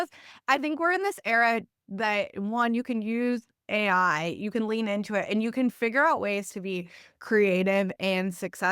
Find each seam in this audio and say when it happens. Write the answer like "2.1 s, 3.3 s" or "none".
none